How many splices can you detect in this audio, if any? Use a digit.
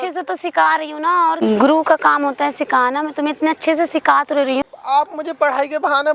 2